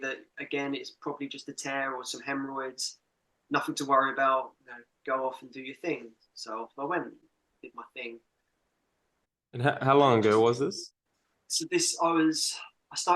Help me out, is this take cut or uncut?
uncut